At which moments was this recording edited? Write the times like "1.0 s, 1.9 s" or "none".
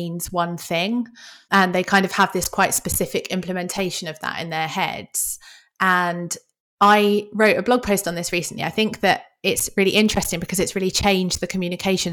1.4 s

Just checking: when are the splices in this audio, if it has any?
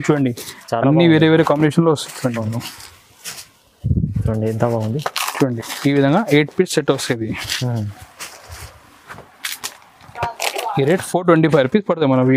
none

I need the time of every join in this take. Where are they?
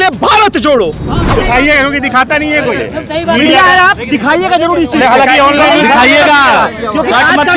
1.3 s

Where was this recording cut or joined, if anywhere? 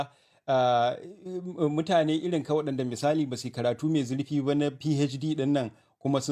none

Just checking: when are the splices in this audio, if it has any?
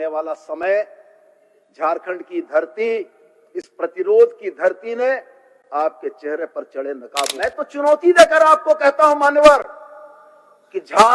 7.3 s

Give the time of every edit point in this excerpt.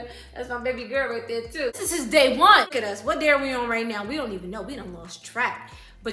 1.7 s, 2.7 s

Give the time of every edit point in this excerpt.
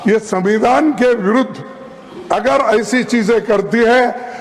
none

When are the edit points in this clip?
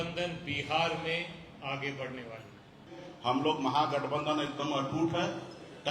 3.0 s

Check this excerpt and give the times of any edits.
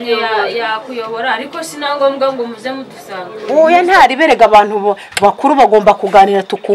3.4 s

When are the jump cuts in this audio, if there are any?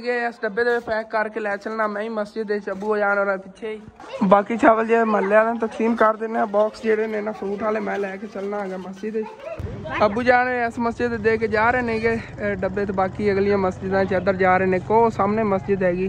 none

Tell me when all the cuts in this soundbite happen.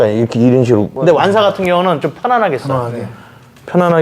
0.9 s

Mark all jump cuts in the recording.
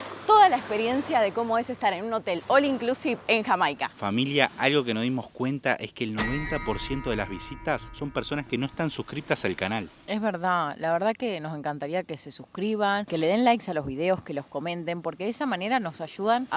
none

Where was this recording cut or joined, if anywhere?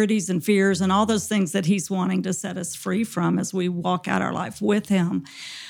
none

